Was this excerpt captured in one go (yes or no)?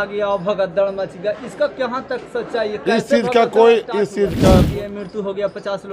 no